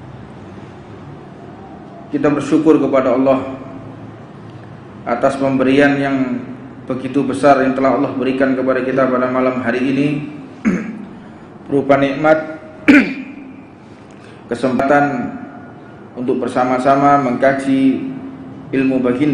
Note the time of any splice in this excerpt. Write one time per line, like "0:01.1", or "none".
0:14.8